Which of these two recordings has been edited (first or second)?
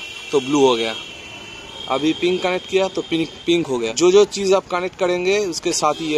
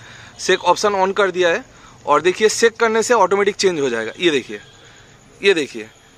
first